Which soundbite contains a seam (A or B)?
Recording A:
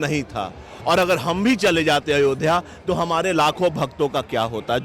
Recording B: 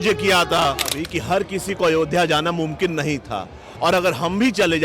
B